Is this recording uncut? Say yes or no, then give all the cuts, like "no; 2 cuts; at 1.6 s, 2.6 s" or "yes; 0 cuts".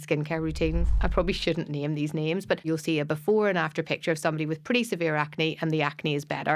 no; 2 cuts; at 1.0 s, 2.6 s